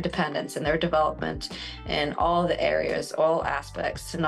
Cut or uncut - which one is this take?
uncut